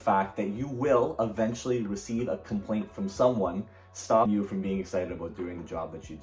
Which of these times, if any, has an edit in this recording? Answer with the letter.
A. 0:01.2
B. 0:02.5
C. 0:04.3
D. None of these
C